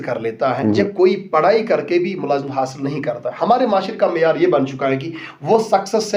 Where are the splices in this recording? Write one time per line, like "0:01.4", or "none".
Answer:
none